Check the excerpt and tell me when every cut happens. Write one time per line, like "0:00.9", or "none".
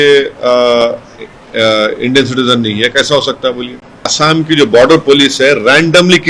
0:04.1